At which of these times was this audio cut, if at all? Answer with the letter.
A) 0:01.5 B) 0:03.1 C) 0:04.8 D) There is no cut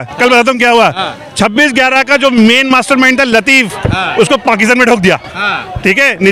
D